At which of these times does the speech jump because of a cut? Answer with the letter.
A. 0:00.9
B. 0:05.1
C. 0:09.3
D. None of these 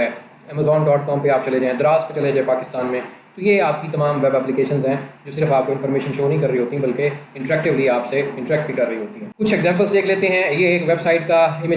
D